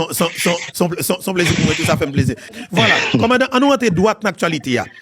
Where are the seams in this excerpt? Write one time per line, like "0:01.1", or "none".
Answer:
0:02.5